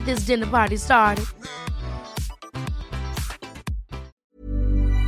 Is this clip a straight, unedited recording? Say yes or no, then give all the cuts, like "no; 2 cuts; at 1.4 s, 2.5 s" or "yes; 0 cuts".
no; 1 cut; at 4.1 s